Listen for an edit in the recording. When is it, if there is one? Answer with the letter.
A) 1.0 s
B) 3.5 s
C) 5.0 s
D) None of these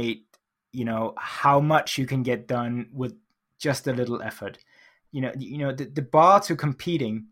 C